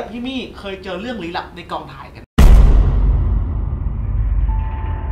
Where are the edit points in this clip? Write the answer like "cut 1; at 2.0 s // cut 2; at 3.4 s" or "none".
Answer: none